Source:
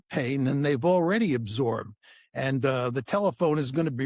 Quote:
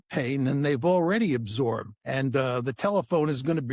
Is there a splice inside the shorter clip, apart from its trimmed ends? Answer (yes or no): yes